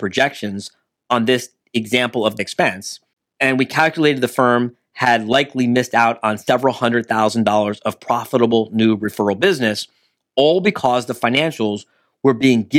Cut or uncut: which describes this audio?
cut